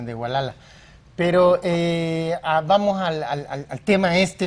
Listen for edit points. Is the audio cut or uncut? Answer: uncut